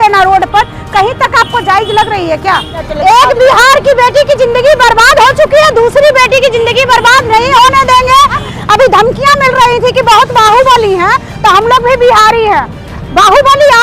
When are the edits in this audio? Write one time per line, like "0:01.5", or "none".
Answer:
0:02.8
0:08.4